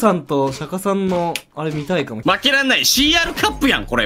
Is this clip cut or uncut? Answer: cut